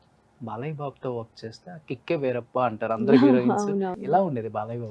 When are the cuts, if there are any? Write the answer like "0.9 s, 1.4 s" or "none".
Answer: 3.9 s